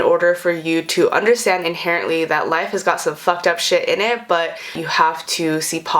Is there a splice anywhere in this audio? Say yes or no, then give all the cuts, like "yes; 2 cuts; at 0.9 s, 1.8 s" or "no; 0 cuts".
yes; 1 cut; at 4.8 s